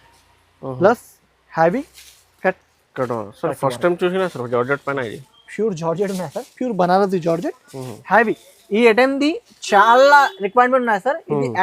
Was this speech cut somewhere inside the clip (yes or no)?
no